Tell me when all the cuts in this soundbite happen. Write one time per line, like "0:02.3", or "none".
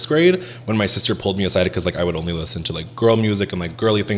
none